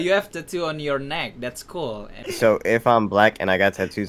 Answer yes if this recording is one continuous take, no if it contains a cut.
no